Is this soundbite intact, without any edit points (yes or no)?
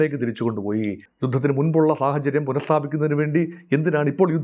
no